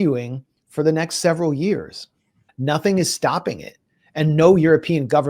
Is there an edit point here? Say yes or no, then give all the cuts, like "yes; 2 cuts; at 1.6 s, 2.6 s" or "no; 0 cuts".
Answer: yes; 1 cut; at 2.5 s